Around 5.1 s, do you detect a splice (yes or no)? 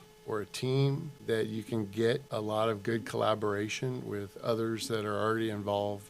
no